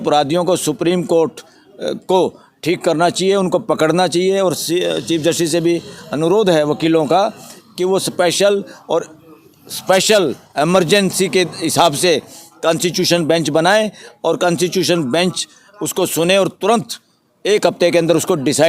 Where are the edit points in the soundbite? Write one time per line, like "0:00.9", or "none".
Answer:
none